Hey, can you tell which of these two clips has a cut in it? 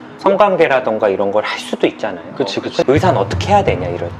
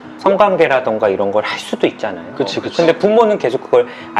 first; 1 cut; at 2.8 s

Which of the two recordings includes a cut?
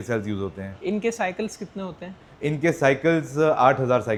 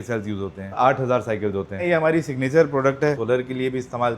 second; 3 cuts; at 0.8 s, 1.8 s, 3.2 s

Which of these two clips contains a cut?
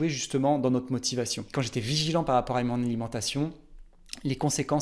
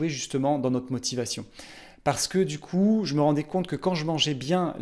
first; 1 cut; at 1.4 s

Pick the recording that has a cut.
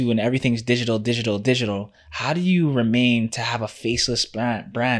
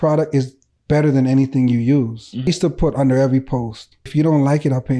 second; 2 cuts; at 2.5 s, 4.1 s

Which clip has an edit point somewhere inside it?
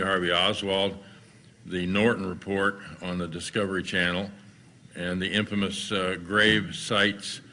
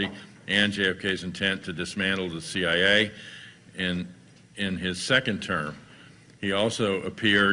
second; 1 cut; at 6.2 s

